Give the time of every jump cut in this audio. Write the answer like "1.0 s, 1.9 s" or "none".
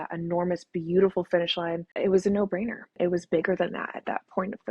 1.9 s